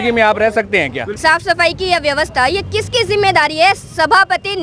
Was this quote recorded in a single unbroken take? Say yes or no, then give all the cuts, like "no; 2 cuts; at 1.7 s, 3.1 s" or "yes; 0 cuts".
no; 1 cut; at 1.2 s